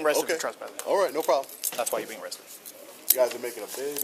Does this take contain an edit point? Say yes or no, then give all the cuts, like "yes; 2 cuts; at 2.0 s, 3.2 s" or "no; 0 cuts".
no; 0 cuts